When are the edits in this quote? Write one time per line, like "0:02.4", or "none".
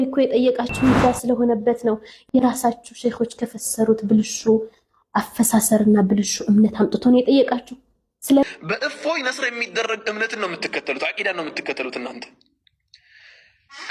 none